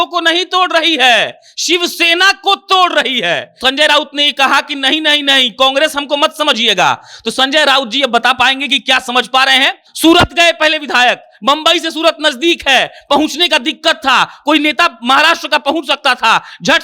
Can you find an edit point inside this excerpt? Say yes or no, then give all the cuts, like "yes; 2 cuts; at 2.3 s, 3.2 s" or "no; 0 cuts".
yes; 2 cuts; at 3.6 s, 9.9 s